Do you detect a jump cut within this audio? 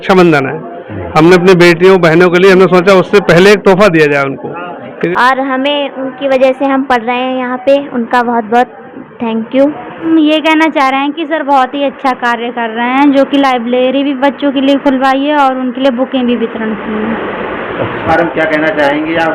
yes; 3 cuts; at 4.9 s, 10.1 s, 18.1 s

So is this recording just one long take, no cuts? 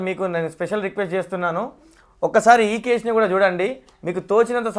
yes; 0 cuts

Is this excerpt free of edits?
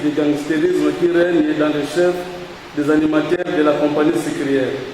yes; 0 cuts

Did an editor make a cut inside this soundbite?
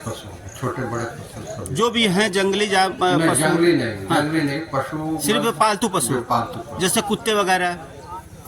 no; 0 cuts

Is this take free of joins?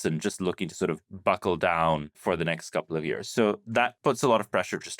no; 2 cuts; at 2.2 s, 3.9 s

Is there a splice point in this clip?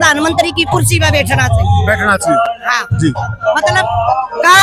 no; 0 cuts

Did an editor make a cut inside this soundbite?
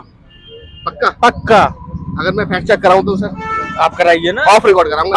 no; 0 cuts

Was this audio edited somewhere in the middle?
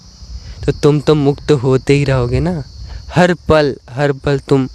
no; 0 cuts

